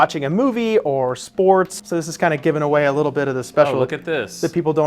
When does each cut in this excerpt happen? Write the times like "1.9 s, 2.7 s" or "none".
1.8 s